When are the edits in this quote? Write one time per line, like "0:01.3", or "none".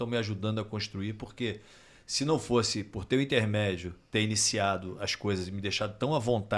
none